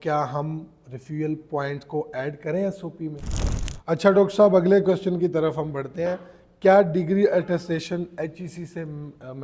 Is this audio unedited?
no; 1 cut; at 3.2 s

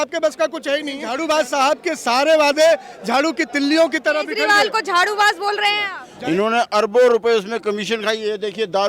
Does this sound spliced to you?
yes; 2 cuts; at 1.1 s, 6.0 s

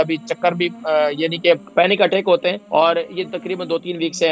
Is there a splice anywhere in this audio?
yes; 2 cuts; at 1.7 s, 2.6 s

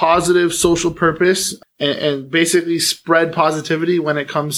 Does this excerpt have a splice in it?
yes; 1 cut; at 1.5 s

